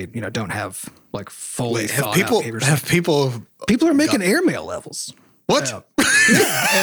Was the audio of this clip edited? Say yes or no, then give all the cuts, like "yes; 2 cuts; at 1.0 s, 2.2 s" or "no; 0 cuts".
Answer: no; 0 cuts